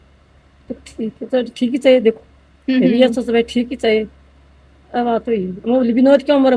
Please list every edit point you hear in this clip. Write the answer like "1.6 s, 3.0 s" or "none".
none